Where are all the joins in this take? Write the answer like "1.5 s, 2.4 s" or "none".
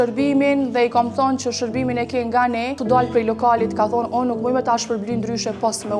2.8 s